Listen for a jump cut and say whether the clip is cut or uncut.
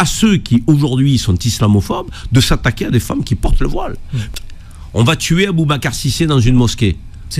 cut